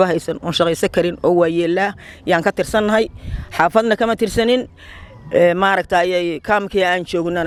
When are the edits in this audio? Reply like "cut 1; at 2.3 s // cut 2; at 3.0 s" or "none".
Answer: none